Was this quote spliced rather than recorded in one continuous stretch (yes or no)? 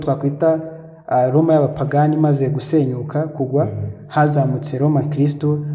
no